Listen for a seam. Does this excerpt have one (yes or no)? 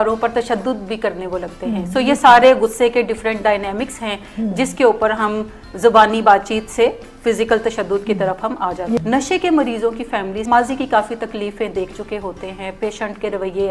yes